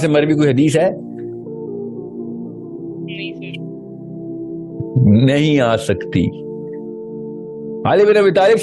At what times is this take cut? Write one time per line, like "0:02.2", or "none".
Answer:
0:00.9
0:03.0
0:04.9